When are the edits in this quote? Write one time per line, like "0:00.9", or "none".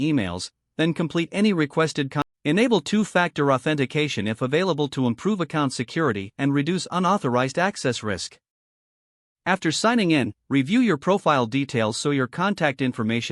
0:02.2